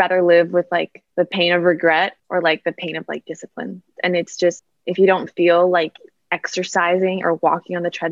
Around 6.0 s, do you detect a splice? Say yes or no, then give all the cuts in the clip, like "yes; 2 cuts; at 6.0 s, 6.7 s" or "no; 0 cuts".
no; 3 cuts; at 1.0 s, 2.2 s, 4.7 s